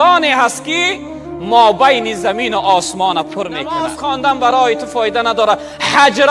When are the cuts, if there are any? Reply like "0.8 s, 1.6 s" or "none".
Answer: 3.9 s